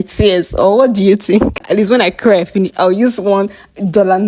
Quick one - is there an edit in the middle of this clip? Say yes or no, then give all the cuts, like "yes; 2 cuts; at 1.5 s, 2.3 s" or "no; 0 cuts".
yes; 1 cut; at 1.6 s